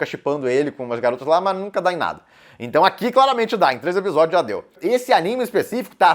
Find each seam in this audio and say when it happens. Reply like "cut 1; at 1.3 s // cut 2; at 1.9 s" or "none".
cut 1; at 4.6 s